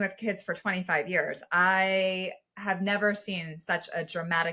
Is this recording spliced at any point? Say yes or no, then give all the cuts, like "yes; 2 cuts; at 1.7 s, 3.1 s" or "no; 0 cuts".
no; 0 cuts